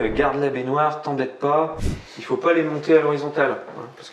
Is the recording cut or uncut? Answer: cut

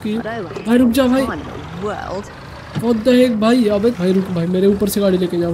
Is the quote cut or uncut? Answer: uncut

